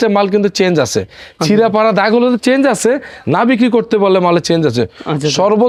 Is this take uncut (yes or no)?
yes